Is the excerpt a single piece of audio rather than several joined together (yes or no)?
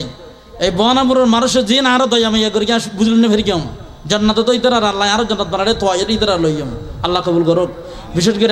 yes